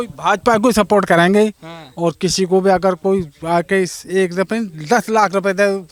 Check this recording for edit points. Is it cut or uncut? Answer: uncut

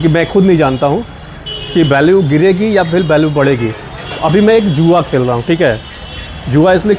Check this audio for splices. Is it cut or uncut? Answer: uncut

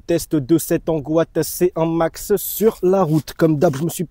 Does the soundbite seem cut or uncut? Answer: uncut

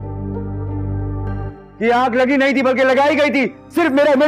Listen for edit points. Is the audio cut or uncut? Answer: uncut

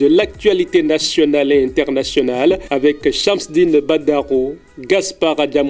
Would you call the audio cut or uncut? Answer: uncut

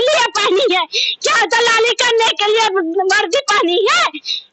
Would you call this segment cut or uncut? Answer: uncut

